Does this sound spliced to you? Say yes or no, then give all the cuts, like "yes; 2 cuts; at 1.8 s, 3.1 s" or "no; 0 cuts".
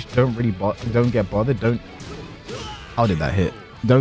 no; 0 cuts